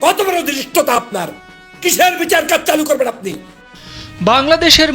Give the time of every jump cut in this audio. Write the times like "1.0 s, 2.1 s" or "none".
3.8 s